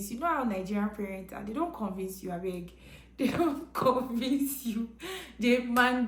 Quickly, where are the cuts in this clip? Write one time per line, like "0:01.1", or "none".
none